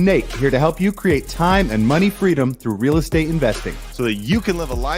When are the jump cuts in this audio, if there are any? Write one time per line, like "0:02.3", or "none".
none